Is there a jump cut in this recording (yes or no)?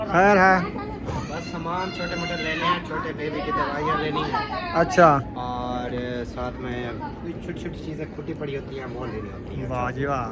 no